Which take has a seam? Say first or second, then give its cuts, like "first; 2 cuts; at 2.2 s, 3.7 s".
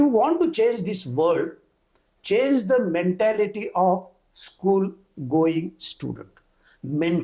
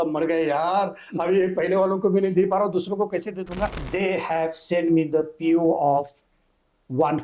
second; 1 cut; at 3.8 s